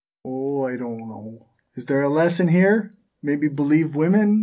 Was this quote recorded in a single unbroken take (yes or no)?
yes